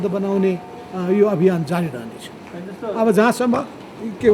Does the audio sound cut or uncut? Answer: uncut